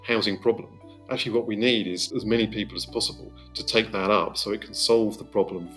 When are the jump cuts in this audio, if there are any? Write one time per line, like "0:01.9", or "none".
0:02.0